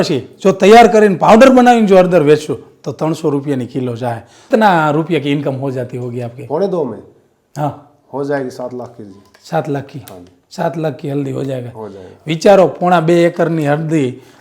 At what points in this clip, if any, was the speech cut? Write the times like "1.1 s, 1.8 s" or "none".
4.4 s